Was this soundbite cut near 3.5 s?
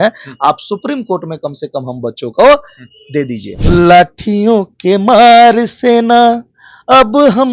yes; 1 cut; at 3.5 s

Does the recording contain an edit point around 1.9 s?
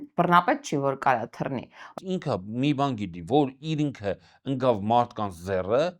yes; 1 cut; at 1.9 s

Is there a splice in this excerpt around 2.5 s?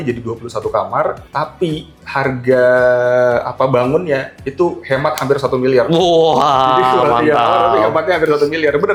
no; 0 cuts

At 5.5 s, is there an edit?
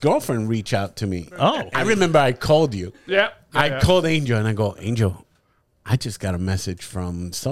no; 1 cut; at 1.7 s

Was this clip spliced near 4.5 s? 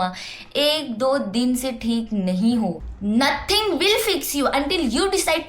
no; 1 cut; at 2.9 s

